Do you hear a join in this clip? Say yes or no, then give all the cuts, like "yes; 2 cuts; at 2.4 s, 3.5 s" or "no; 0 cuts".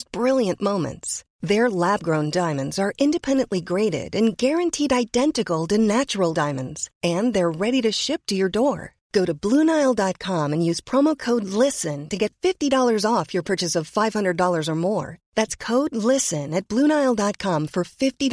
no; 0 cuts